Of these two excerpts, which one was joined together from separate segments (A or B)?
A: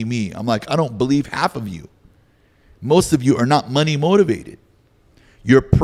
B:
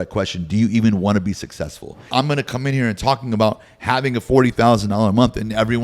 B